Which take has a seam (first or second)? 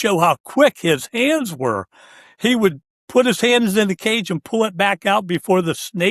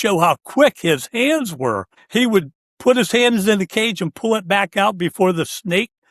second